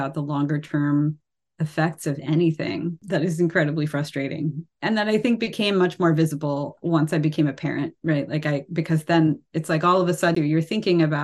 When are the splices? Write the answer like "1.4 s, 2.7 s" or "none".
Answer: 3.0 s, 4.7 s, 6.7 s, 10.3 s